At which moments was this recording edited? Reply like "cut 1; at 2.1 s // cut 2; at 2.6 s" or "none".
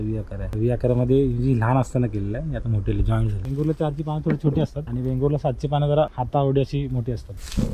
cut 1; at 3.5 s